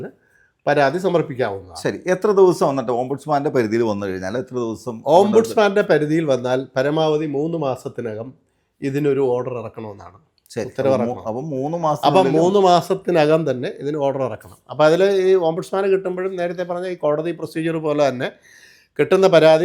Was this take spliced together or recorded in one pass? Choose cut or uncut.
uncut